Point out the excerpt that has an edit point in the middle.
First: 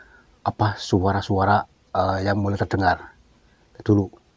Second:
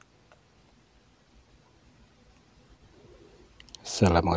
second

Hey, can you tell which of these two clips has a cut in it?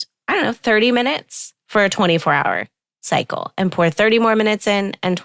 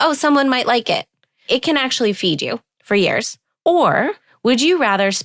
second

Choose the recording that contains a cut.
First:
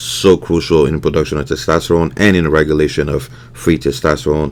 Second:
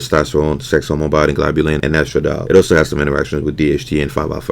second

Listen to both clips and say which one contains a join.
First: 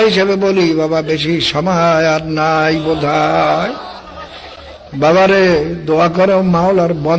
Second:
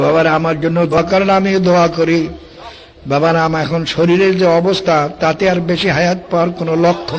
second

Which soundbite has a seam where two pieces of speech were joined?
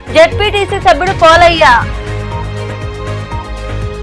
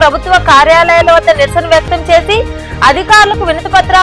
first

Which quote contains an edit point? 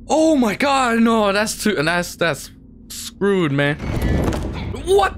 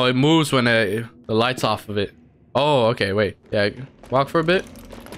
second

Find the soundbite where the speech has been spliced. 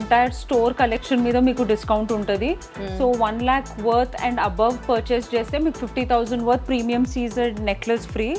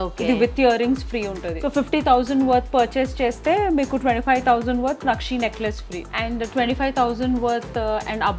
second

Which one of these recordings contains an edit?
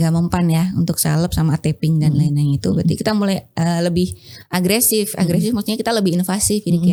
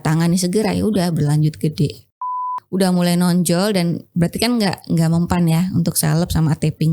second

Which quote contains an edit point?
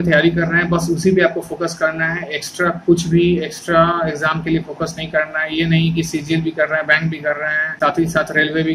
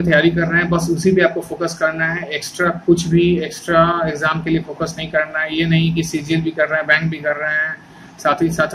first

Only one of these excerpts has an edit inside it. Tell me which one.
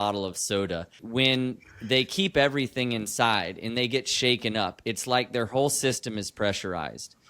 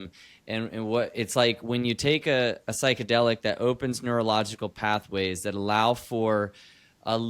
first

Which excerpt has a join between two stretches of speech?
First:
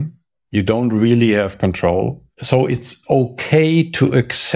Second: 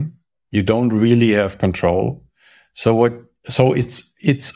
first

